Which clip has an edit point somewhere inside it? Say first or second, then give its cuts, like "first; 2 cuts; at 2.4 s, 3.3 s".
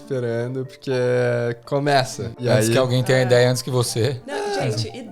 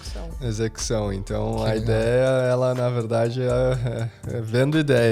first; 2 cuts; at 2.2 s, 4.2 s